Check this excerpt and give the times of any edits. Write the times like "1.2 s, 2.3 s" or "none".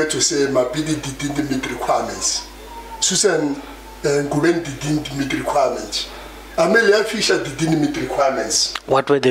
none